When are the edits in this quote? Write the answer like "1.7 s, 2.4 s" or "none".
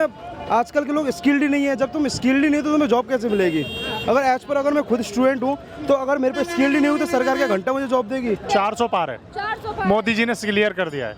8.5 s